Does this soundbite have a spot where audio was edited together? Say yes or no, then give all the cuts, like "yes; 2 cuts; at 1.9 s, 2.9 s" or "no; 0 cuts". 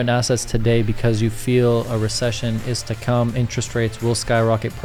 no; 0 cuts